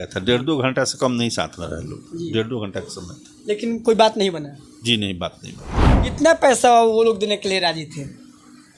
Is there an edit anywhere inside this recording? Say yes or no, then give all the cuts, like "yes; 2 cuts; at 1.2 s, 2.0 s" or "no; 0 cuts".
yes; 1 cut; at 6.0 s